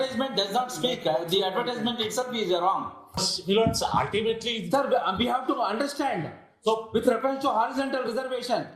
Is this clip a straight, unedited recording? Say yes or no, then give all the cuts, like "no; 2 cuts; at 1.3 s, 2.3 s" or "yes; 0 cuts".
no; 1 cut; at 3.3 s